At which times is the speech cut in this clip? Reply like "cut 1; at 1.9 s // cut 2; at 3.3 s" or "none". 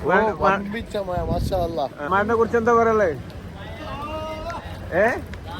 cut 1; at 2.1 s